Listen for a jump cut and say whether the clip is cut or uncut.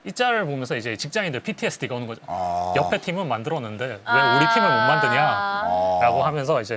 uncut